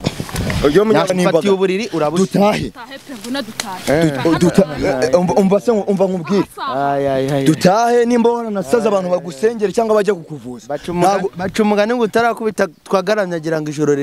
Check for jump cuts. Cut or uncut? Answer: cut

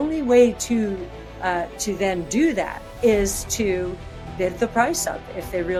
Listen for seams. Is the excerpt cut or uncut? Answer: uncut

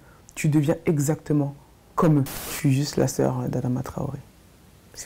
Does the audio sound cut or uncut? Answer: cut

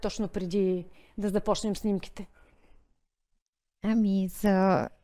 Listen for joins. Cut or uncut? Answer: uncut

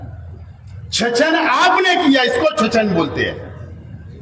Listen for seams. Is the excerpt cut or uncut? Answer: uncut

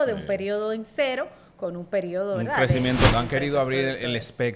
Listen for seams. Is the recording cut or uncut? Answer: cut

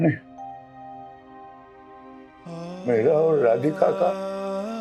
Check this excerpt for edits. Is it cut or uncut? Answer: uncut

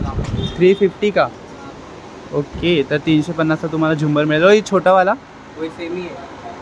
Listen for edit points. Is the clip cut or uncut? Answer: uncut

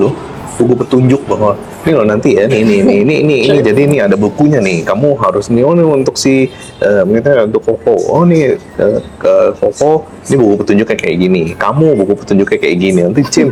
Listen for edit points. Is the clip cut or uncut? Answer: uncut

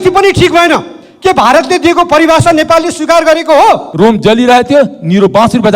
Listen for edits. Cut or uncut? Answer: cut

